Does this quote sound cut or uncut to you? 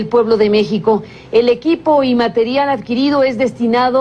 cut